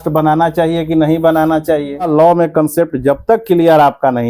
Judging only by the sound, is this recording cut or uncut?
cut